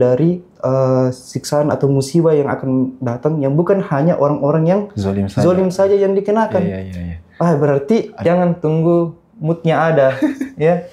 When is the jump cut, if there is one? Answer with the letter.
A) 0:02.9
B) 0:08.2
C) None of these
B